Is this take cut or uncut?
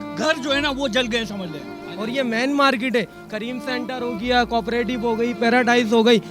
cut